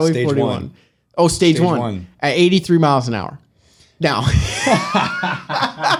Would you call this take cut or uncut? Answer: uncut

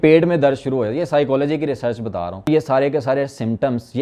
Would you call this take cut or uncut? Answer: cut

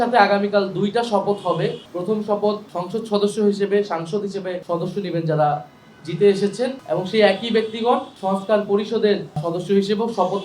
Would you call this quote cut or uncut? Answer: cut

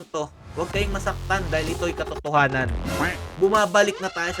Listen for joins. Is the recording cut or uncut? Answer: uncut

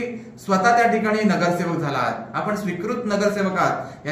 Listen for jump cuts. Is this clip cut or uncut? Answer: uncut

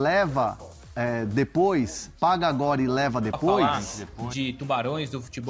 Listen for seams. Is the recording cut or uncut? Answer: cut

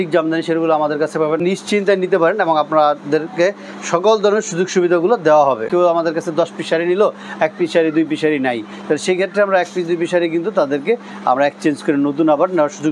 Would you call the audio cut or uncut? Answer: cut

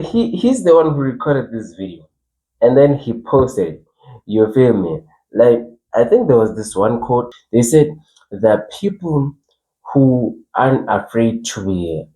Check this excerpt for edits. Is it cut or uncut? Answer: cut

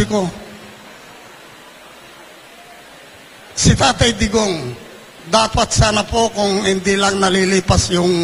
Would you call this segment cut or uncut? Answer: uncut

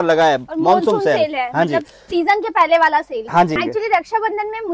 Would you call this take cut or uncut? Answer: cut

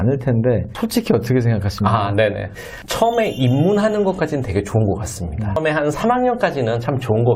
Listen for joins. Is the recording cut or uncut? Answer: cut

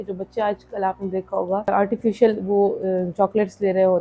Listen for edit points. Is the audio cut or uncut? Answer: cut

